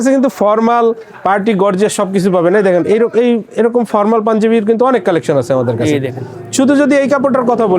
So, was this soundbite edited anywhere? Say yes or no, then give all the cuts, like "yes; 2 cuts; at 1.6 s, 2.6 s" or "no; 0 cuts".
no; 0 cuts